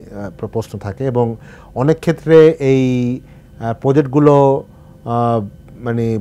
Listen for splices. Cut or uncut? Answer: uncut